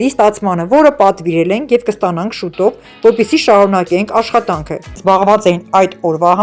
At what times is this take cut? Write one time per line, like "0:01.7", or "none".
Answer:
0:05.0